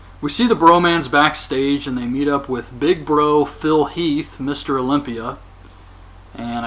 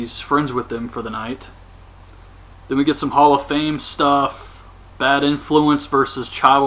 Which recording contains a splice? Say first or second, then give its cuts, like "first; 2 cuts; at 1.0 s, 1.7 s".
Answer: first; 1 cut; at 1.9 s